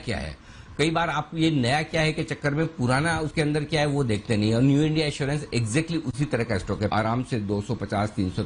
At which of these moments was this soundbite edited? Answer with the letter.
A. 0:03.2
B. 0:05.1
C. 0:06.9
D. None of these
C